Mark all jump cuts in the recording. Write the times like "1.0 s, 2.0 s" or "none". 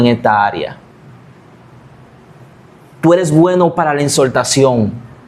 none

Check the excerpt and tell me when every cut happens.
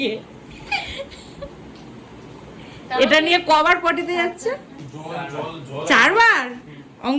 none

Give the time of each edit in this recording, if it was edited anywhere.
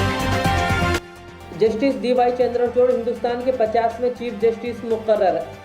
1.0 s

